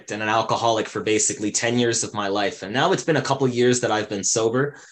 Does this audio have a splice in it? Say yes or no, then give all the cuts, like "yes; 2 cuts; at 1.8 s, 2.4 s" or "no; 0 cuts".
no; 0 cuts